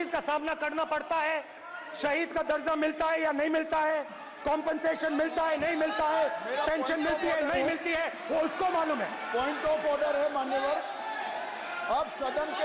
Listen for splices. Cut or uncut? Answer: uncut